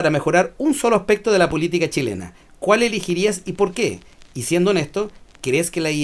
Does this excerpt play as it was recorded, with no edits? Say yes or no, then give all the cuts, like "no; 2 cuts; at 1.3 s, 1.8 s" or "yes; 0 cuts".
yes; 0 cuts